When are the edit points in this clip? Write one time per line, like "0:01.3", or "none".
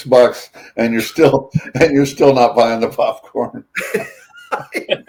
none